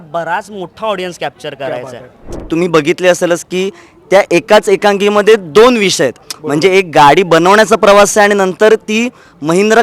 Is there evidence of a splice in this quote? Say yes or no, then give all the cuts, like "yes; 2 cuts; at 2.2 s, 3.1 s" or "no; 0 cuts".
yes; 1 cut; at 2.4 s